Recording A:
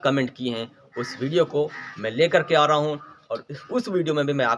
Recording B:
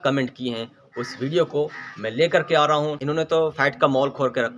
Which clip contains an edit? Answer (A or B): B